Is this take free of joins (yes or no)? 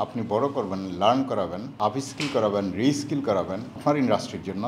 no